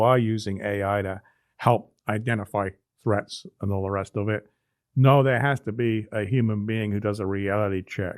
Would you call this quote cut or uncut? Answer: uncut